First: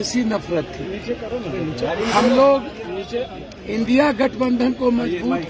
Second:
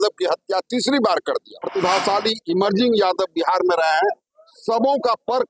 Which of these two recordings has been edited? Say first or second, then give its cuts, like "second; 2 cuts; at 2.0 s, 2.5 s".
second; 1 cut; at 1.6 s